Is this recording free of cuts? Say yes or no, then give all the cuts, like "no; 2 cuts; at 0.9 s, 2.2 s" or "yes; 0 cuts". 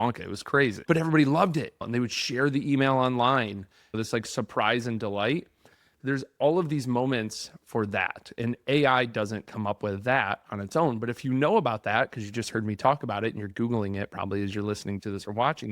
no; 3 cuts; at 0.8 s, 1.8 s, 3.9 s